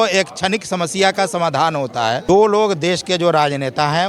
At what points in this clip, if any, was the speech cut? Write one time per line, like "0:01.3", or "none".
0:02.2